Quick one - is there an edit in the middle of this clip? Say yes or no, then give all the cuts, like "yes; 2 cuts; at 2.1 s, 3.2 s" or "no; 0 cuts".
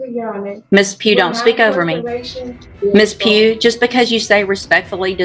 yes; 1 cut; at 2.6 s